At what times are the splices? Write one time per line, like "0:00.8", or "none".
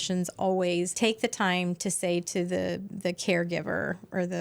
0:00.9